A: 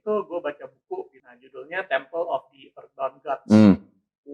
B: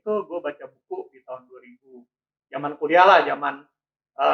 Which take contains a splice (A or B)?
A